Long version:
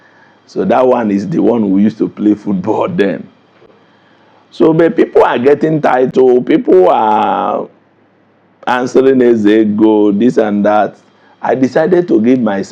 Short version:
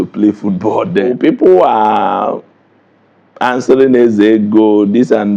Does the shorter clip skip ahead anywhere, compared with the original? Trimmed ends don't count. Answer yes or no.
yes